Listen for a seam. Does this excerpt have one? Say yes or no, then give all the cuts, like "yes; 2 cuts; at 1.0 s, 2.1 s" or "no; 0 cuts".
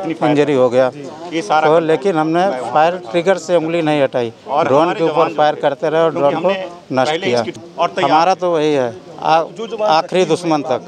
yes; 1 cut; at 7.5 s